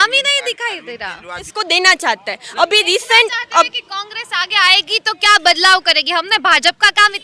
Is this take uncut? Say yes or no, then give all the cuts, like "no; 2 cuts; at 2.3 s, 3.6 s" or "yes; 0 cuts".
no; 1 cut; at 1.5 s